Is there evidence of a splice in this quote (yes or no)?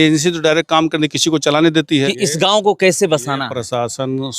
yes